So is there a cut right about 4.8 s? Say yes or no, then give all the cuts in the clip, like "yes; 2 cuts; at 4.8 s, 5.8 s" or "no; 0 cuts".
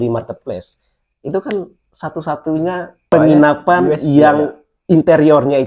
no; 1 cut; at 3.1 s